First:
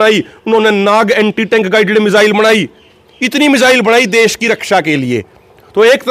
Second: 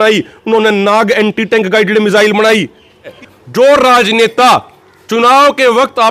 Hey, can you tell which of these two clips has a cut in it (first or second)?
second